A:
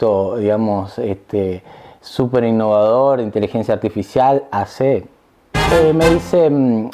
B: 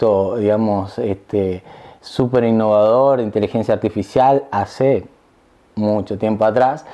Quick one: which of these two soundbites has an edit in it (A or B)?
A